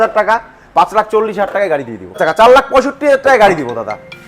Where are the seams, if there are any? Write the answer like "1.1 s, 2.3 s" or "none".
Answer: 2.2 s